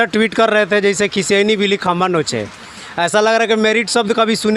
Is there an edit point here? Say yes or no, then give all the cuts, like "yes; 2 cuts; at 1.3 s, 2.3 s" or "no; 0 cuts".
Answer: no; 0 cuts